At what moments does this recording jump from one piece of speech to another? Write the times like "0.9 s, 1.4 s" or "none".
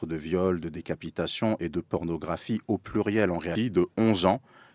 3.5 s